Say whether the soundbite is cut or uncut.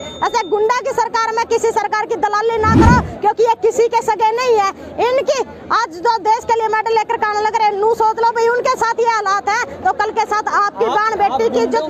uncut